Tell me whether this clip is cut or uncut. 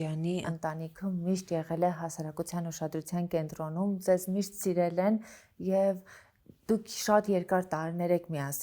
uncut